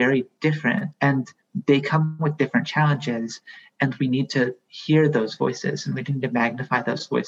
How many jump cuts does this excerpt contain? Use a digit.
1